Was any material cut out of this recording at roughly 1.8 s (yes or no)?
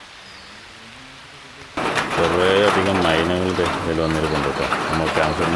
yes